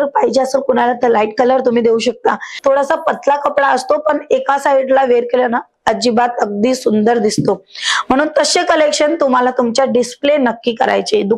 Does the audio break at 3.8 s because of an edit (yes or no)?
no